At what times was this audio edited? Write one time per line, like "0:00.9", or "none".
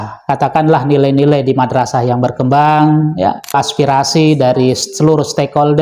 0:03.5